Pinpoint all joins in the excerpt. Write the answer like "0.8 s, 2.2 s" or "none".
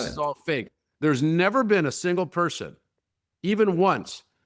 none